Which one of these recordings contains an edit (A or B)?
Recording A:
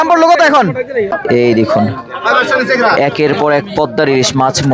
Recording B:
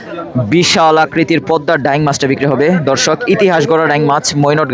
A